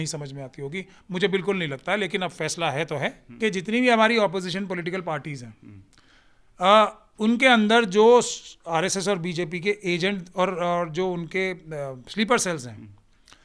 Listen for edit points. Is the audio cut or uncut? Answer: cut